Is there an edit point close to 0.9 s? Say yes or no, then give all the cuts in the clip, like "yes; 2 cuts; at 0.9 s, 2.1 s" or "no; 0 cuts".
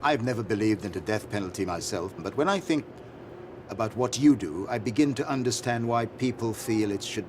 no; 1 cut; at 2.2 s